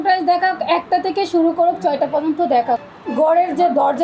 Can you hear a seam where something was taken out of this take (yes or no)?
yes